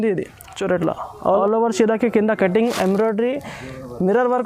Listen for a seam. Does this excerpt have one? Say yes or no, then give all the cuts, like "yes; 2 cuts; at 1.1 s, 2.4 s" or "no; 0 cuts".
yes; 1 cut; at 1.1 s